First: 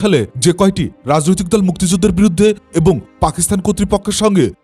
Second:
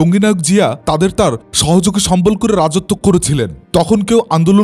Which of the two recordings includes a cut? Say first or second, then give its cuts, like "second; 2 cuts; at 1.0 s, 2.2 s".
second; 1 cut; at 3.6 s